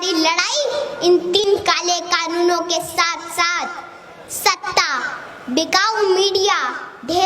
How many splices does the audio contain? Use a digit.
1